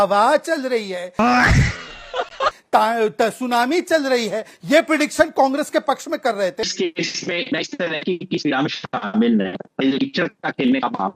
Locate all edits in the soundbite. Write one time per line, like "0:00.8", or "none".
0:06.6